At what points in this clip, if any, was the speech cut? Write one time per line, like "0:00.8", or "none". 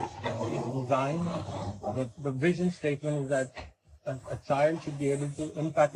none